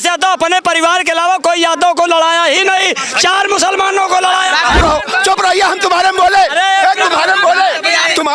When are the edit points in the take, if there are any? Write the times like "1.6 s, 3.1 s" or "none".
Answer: 4.8 s